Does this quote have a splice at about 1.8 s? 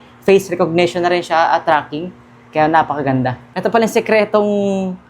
no; 1 cut; at 3.4 s

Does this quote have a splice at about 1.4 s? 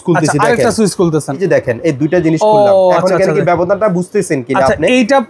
yes; 1 cut; at 1.4 s

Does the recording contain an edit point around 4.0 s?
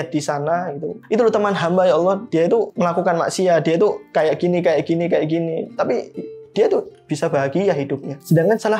no; 1 cut; at 1.0 s

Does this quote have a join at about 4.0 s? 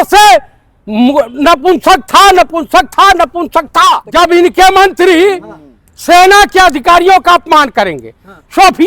yes; 1 cut; at 4.0 s

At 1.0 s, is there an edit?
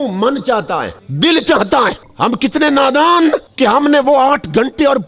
yes; 3 cuts; at 1.0 s, 2.0 s, 3.5 s

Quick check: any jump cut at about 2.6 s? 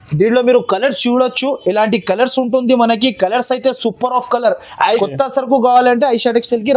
no; 1 cut; at 5.0 s

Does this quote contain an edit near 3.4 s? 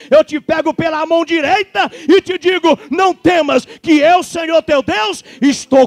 no; 0 cuts

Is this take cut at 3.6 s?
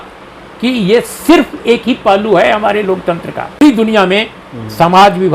yes; 1 cut; at 3.6 s

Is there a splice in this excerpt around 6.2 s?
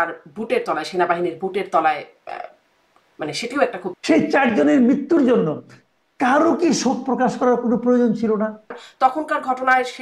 no; 2 cuts; at 4.0 s, 8.8 s

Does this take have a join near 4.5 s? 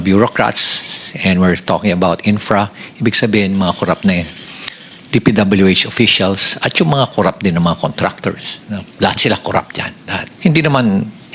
no; 1 cut; at 10.2 s

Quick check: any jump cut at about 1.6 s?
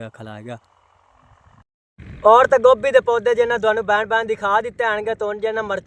yes; 1 cut; at 1.6 s

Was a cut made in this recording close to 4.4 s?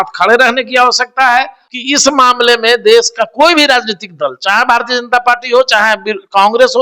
no; 1 cut; at 1.6 s

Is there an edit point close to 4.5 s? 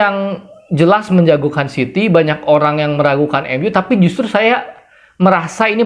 no; 0 cuts

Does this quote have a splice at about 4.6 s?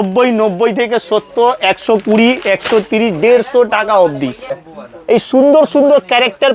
yes; 1 cut; at 4.6 s

